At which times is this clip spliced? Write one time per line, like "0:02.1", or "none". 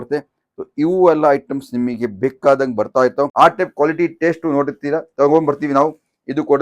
0:03.3

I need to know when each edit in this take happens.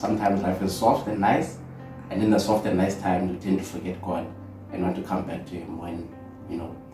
none

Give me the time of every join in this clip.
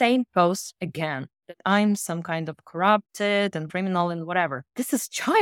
0:03.7

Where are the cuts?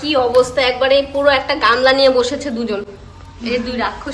none

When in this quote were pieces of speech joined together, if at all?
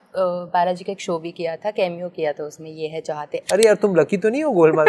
0:03.4

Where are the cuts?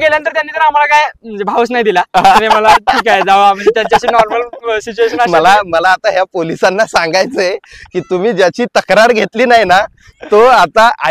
none

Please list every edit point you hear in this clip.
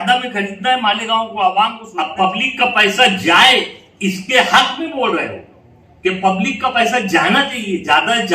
0:01.8

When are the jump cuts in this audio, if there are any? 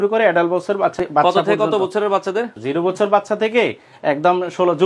0:01.0
0:02.5

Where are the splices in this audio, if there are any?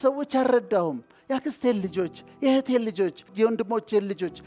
0:03.3

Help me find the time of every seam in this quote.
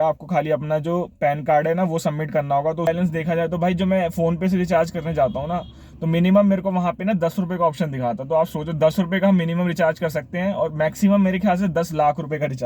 0:02.9

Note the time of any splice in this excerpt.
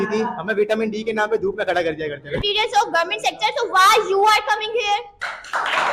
0:02.4

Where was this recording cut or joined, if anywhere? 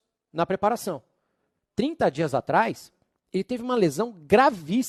none

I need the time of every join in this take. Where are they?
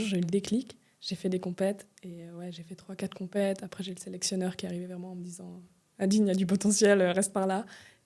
none

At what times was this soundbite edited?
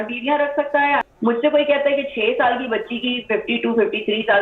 0:01.1

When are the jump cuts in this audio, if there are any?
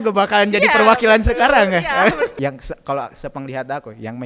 0:02.3

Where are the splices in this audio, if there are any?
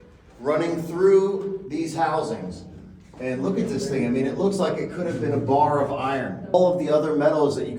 0:06.5

